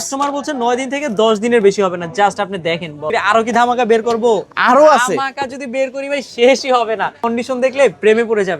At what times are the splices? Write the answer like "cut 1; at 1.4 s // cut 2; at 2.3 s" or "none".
cut 1; at 3.0 s // cut 2; at 7.3 s